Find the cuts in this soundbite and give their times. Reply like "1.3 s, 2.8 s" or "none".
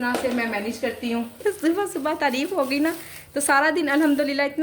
1.4 s